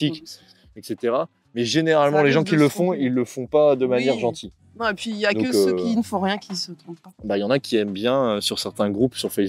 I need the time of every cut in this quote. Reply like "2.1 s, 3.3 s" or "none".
none